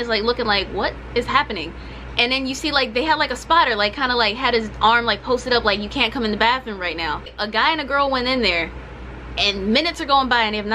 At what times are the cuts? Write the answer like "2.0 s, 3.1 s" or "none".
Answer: 7.3 s